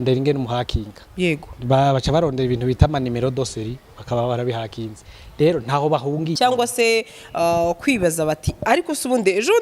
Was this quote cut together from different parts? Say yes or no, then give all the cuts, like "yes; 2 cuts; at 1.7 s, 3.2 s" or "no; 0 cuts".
yes; 1 cut; at 6.4 s